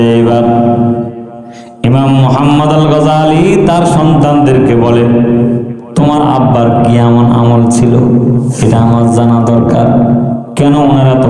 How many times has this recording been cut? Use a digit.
0